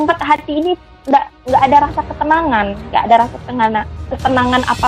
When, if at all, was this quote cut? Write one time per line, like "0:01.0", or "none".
none

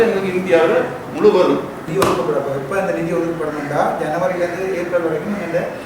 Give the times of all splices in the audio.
0:01.8

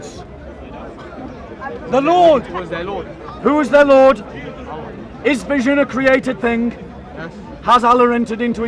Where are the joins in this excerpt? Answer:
none

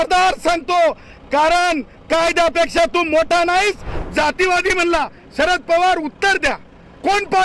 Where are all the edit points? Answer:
0:04.0

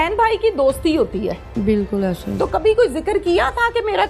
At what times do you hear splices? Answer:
0:01.6

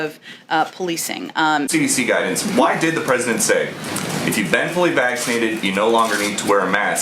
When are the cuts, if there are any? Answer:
0:01.7

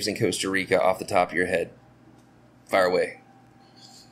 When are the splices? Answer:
none

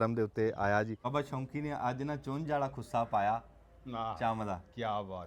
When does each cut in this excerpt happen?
0:01.0

